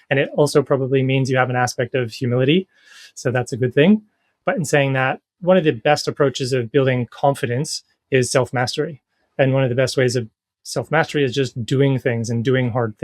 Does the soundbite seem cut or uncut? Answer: cut